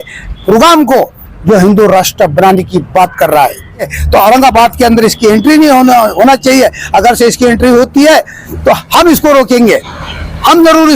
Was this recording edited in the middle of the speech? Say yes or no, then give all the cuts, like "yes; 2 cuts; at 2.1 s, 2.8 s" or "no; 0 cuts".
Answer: yes; 1 cut; at 4.0 s